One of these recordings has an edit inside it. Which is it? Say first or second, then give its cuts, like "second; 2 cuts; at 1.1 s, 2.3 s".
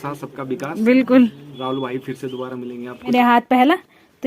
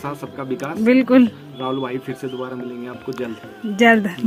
first; 1 cut; at 3.1 s